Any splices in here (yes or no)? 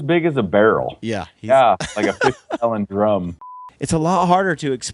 yes